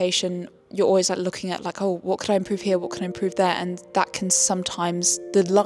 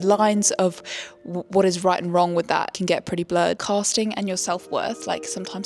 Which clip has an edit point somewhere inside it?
second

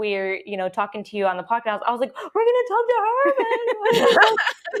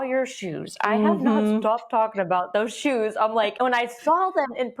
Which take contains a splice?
second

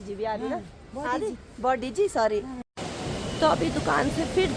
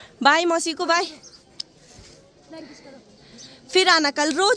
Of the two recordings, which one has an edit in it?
first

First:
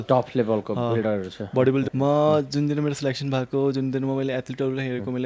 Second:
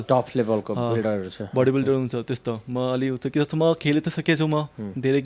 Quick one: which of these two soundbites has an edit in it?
first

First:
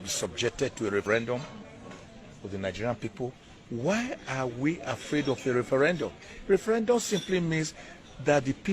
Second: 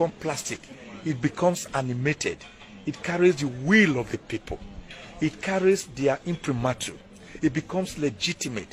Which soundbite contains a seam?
first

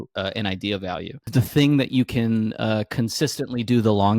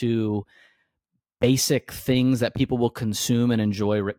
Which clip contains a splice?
first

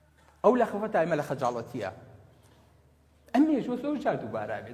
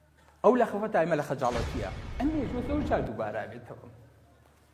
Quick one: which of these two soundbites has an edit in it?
second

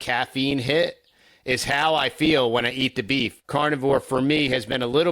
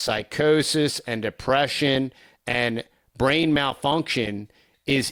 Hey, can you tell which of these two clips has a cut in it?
first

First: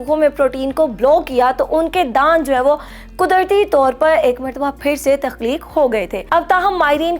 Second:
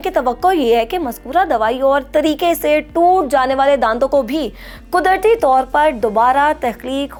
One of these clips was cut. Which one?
first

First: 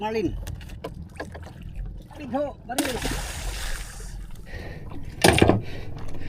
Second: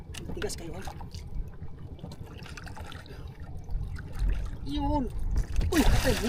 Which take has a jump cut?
first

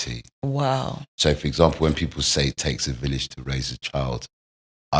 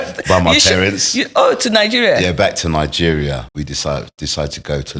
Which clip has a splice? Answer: second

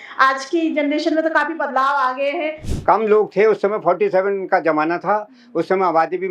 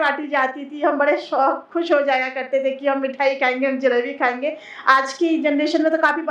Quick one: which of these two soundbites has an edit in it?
first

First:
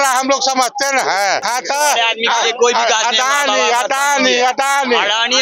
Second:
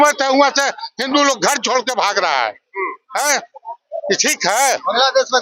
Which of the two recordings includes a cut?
first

